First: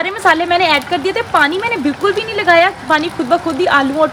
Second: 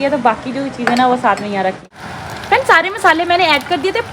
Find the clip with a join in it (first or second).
second